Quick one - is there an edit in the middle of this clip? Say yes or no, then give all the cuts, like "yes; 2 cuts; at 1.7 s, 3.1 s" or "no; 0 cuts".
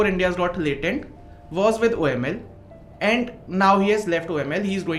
no; 0 cuts